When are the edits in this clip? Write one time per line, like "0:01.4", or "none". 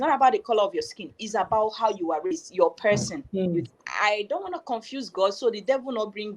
0:03.9